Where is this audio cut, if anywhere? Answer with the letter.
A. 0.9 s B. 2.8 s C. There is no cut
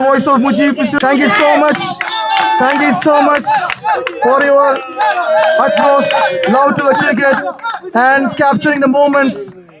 A